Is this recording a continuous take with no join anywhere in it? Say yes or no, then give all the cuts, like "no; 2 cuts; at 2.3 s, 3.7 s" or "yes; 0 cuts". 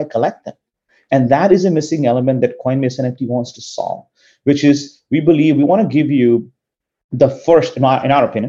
yes; 0 cuts